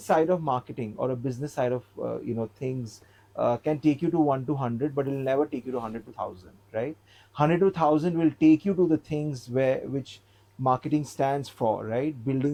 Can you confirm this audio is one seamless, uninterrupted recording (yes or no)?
yes